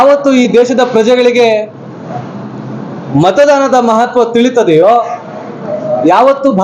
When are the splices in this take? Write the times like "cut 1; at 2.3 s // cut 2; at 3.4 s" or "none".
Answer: none